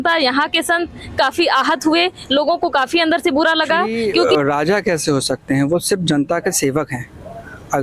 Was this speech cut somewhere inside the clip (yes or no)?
yes